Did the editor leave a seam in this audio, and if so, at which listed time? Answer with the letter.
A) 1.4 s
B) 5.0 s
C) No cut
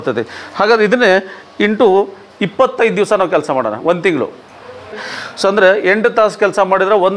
B